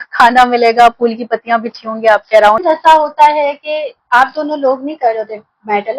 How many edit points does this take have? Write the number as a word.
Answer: one